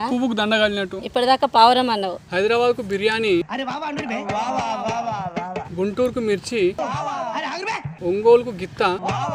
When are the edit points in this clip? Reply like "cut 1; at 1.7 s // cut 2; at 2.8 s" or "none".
cut 1; at 2.2 s